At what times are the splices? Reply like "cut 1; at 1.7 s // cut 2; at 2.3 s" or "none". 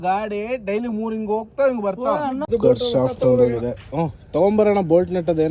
cut 1; at 2.5 s